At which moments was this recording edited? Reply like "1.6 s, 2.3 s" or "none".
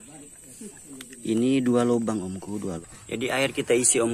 2.8 s